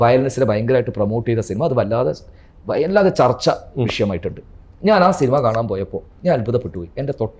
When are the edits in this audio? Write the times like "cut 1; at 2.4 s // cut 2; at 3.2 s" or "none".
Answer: none